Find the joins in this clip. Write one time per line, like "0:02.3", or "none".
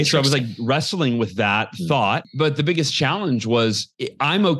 0:02.3